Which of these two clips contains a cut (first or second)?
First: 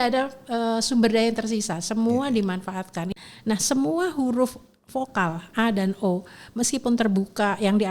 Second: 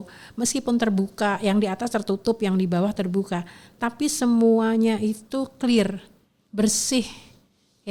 first